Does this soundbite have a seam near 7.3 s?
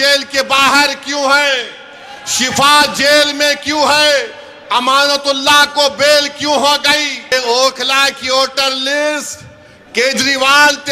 yes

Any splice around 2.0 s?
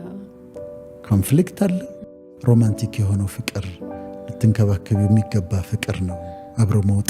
yes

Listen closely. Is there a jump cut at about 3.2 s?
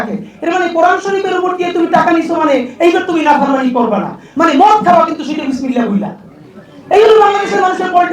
no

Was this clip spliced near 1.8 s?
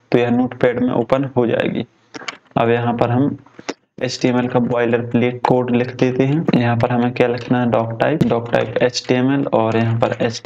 no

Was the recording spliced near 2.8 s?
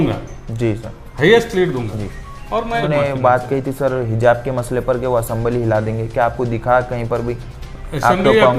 yes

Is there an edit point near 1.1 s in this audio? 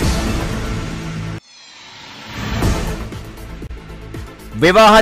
yes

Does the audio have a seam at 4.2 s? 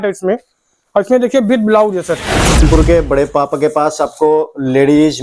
no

